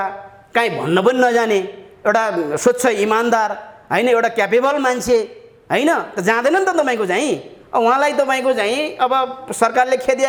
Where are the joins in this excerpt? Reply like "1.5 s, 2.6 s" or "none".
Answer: none